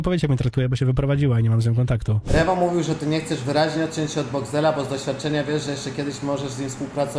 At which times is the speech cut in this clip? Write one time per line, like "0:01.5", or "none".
0:02.2